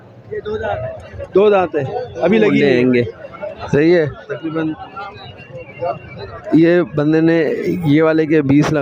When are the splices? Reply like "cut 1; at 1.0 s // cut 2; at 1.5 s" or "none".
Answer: cut 1; at 2.5 s